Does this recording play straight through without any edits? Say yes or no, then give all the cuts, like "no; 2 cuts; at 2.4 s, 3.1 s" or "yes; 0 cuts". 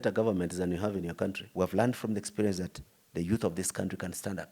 no; 1 cut; at 1.4 s